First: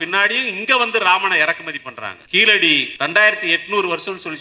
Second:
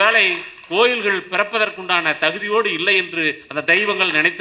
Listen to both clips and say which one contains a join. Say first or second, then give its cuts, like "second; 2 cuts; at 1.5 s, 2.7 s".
first; 2 cuts; at 2.1 s, 2.9 s